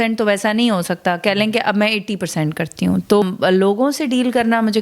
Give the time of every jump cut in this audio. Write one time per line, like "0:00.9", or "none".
0:03.2